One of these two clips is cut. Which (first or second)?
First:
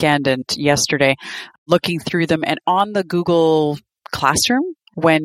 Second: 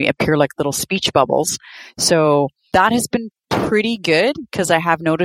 second